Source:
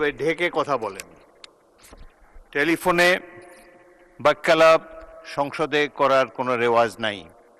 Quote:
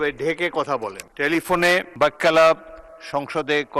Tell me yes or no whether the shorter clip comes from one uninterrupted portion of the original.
no